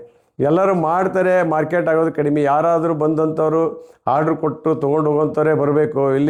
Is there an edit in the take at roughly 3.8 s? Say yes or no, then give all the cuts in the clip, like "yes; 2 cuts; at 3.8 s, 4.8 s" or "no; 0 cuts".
no; 0 cuts